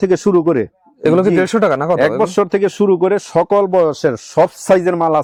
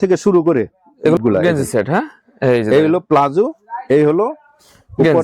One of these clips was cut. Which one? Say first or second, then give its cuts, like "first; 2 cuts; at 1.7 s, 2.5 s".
second; 1 cut; at 1.2 s